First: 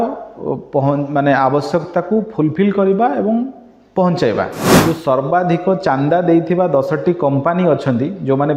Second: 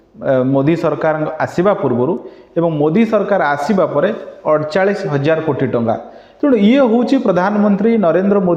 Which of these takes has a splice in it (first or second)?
first